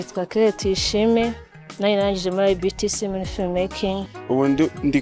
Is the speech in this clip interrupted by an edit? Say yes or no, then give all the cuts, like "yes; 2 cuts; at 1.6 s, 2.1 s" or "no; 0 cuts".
yes; 1 cut; at 4.1 s